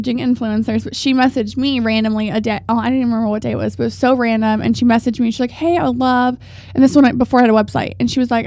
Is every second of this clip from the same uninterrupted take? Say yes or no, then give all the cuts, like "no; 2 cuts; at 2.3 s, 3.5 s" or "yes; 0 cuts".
yes; 0 cuts